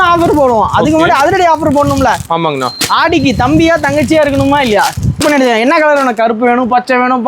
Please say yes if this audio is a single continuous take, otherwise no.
no